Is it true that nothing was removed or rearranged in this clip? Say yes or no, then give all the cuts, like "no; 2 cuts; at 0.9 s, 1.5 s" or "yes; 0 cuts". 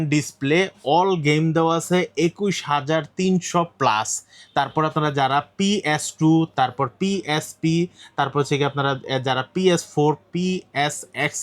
yes; 0 cuts